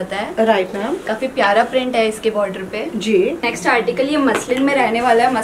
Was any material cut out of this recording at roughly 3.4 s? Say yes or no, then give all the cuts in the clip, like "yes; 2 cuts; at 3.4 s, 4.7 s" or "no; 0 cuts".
yes; 1 cut; at 3.4 s